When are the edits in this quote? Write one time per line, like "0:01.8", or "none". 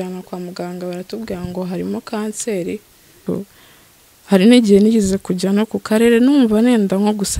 0:03.2